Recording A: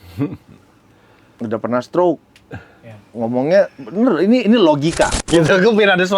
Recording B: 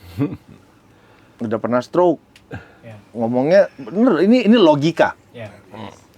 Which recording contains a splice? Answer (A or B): A